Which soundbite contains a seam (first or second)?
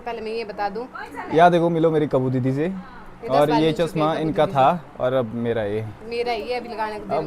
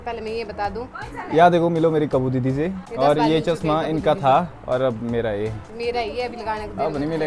second